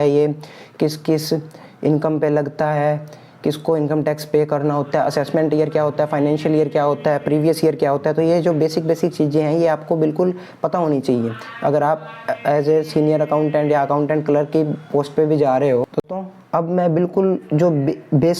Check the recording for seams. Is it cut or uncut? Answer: cut